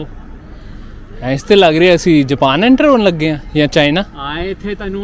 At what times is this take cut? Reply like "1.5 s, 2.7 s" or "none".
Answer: none